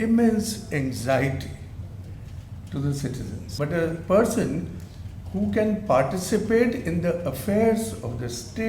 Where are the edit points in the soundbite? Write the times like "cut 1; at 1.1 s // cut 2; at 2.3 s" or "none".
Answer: cut 1; at 3.4 s